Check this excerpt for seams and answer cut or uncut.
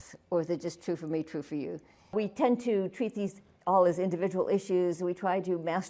cut